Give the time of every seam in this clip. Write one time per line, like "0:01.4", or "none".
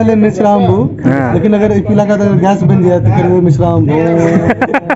none